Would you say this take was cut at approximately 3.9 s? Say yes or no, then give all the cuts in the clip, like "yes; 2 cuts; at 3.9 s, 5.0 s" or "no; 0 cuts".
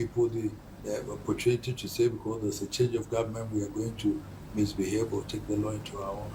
no; 0 cuts